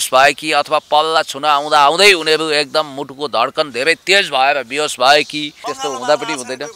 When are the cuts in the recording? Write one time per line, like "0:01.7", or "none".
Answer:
0:05.7